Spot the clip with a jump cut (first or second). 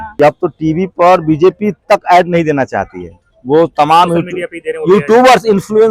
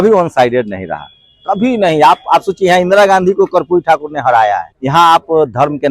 second